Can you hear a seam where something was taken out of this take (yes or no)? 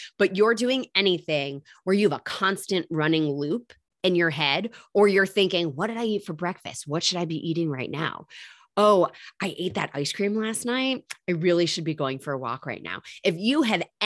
no